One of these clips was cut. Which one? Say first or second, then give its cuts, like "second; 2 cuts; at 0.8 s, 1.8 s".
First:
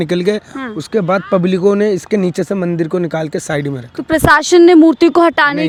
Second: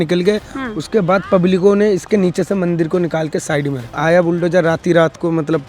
second; 1 cut; at 3.9 s